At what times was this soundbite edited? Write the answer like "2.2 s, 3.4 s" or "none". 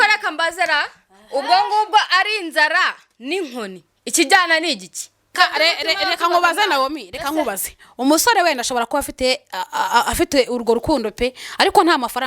5.3 s